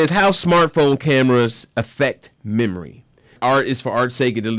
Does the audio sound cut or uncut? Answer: cut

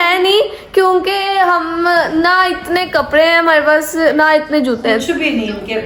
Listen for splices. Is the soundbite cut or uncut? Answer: uncut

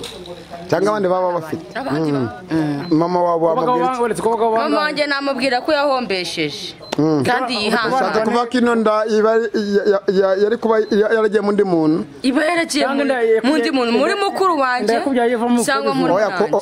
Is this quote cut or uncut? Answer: cut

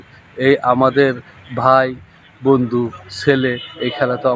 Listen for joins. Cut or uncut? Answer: uncut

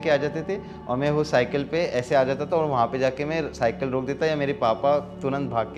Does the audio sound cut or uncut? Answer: uncut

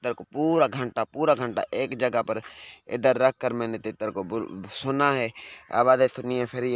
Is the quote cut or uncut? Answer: uncut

